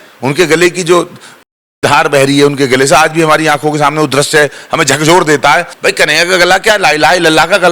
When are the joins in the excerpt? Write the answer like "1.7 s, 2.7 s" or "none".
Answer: 5.7 s